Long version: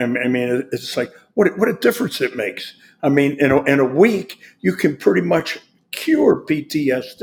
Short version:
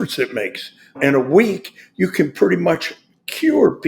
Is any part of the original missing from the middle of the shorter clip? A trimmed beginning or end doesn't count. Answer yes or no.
yes